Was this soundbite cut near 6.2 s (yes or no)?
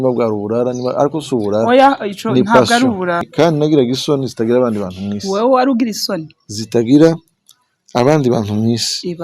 no